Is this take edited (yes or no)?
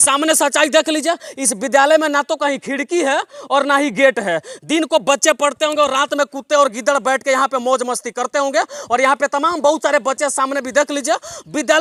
no